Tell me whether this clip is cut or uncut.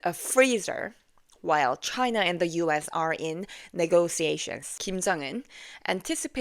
cut